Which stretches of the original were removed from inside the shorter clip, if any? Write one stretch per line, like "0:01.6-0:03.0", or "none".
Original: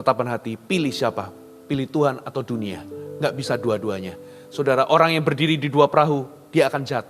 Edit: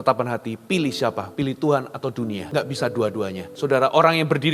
0:01.2-0:01.6
0:02.8-0:03.1
0:04.1-0:04.4